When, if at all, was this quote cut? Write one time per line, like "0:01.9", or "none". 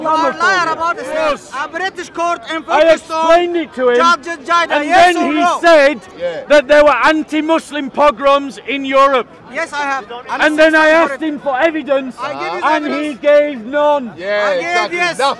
0:01.3